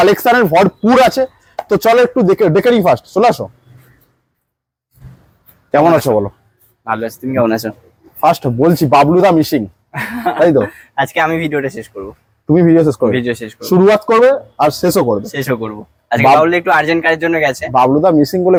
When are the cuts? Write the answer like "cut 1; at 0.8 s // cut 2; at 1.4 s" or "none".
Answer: none